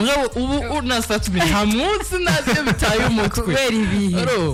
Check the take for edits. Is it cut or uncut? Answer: uncut